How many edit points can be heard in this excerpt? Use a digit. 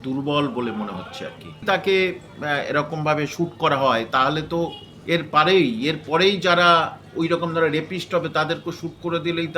1